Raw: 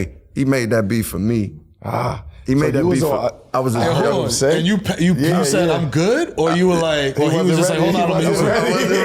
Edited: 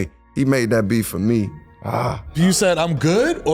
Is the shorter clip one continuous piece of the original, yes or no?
no